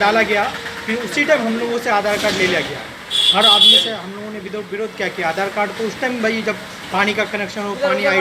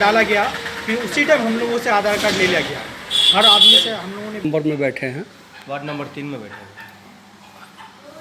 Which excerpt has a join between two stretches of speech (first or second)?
second